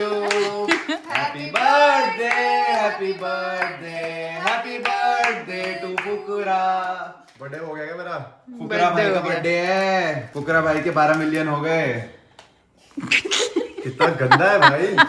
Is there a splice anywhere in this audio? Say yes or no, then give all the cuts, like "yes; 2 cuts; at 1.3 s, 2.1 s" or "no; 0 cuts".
yes; 1 cut; at 10.3 s